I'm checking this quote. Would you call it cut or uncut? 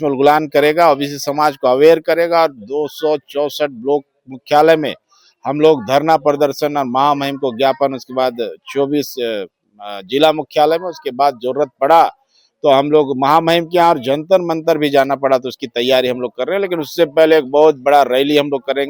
uncut